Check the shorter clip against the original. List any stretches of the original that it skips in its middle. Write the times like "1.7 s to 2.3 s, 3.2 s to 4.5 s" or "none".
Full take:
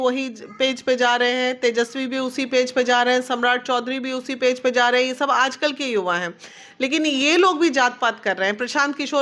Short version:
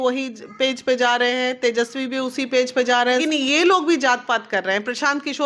3.2 s to 7.0 s